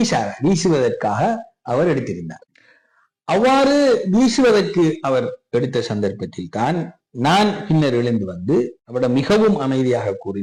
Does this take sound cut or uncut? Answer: uncut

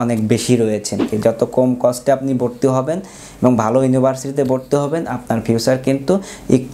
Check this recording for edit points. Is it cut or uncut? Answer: cut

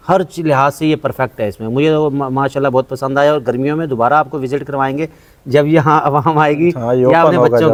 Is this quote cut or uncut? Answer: uncut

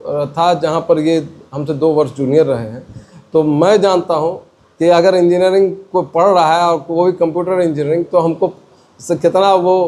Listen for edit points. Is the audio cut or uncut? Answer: uncut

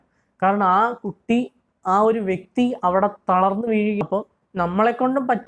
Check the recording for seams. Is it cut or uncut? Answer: cut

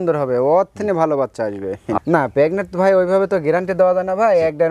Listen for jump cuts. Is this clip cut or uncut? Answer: cut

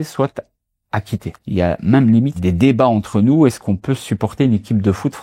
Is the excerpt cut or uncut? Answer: cut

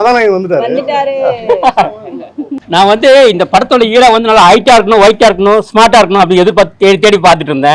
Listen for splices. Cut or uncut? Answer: cut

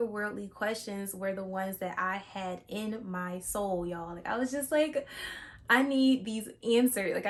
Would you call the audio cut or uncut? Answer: uncut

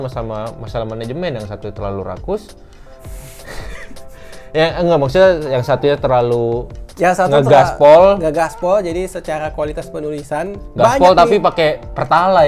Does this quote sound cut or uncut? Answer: uncut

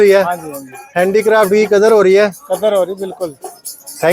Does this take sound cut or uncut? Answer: uncut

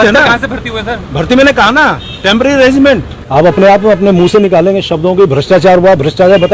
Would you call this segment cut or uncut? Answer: cut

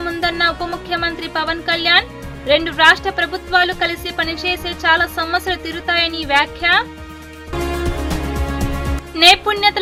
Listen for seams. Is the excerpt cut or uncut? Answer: uncut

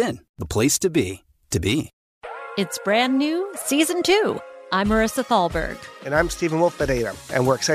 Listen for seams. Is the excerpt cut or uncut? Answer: cut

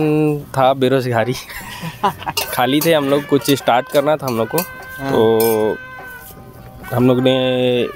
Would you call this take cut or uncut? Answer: uncut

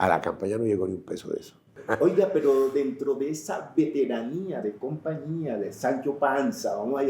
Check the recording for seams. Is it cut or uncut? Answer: cut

